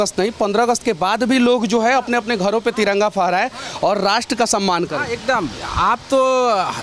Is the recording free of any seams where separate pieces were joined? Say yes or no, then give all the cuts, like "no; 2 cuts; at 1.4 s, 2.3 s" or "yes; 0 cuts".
yes; 0 cuts